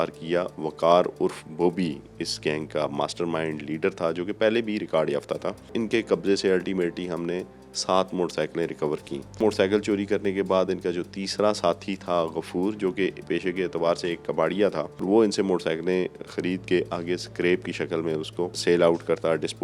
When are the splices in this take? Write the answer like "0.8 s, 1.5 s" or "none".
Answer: 5.7 s, 9.4 s, 15.0 s, 18.6 s